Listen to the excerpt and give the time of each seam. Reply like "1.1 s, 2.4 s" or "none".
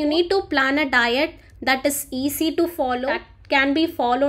3.3 s